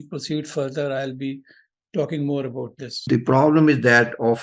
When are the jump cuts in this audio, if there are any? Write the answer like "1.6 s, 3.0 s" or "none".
3.0 s